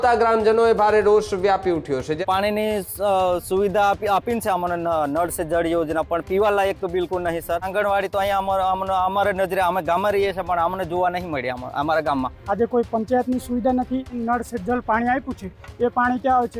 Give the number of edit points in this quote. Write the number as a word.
four